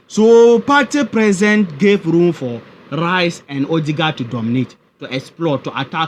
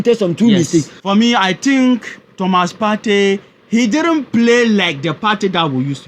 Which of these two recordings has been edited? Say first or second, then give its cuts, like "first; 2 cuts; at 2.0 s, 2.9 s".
second; 1 cut; at 0.9 s